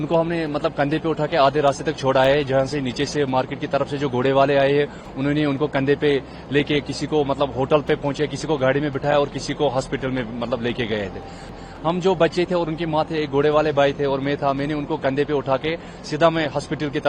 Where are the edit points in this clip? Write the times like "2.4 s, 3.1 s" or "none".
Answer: 11.5 s